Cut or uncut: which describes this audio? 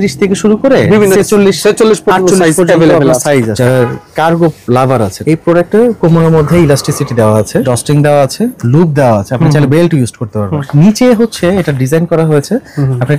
cut